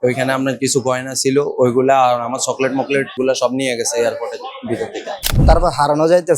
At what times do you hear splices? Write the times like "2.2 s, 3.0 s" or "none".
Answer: 3.2 s, 5.3 s